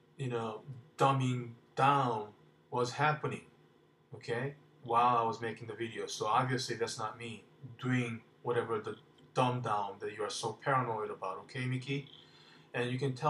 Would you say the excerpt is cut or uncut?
uncut